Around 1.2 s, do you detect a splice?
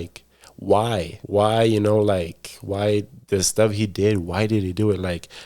yes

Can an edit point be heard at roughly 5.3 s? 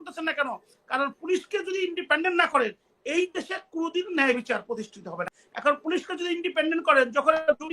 yes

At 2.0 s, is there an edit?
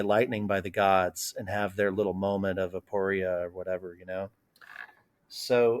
no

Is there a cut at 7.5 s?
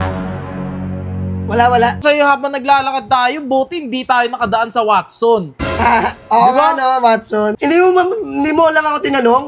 yes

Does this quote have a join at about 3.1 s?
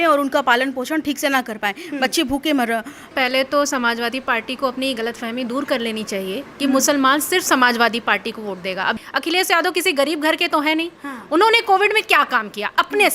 yes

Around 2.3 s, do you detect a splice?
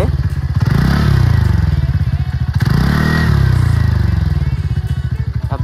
no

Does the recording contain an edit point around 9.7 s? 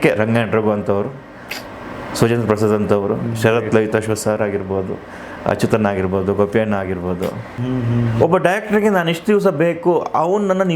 no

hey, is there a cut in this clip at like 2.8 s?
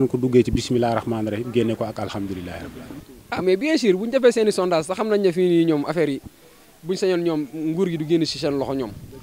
yes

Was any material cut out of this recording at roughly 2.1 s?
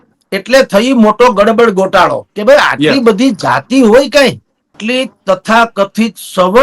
no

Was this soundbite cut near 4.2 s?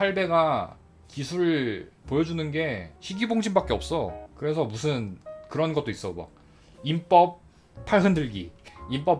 yes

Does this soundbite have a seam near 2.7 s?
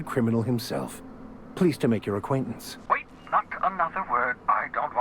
yes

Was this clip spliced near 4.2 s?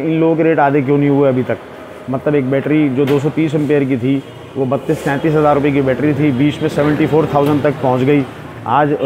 no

